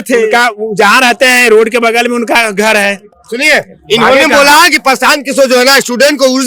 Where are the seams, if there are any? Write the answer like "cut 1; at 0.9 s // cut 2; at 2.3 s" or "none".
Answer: none